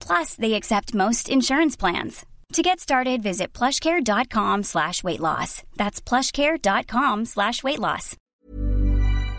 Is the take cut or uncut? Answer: cut